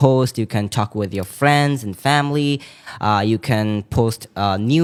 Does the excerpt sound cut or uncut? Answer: uncut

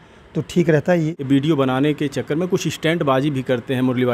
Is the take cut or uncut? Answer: cut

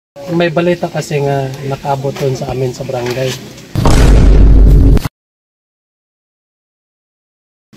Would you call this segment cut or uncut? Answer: uncut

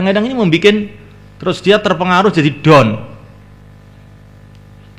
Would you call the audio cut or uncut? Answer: uncut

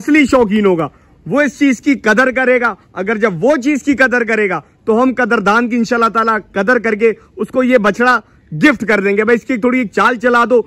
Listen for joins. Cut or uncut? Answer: uncut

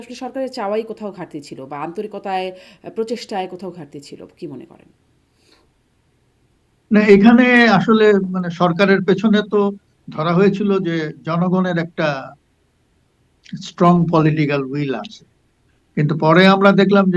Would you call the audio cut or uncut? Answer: uncut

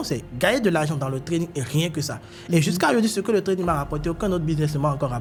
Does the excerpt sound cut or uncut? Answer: uncut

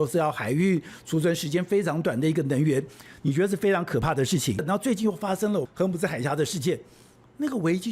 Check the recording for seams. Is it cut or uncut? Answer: cut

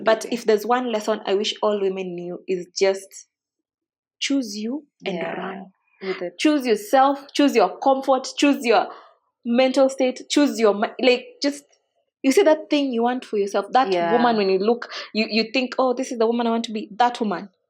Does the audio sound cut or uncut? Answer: uncut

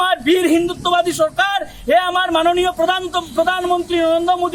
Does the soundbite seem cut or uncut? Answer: uncut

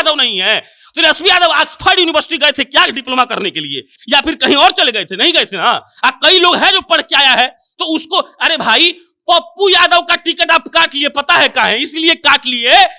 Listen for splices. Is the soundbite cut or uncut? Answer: uncut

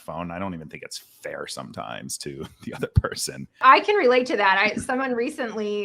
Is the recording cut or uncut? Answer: cut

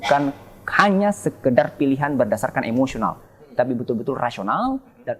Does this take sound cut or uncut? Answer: uncut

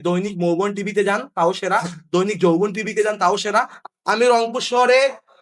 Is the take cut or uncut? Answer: cut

